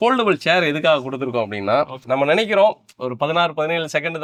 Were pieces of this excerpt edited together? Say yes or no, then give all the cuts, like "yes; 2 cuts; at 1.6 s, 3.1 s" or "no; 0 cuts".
no; 0 cuts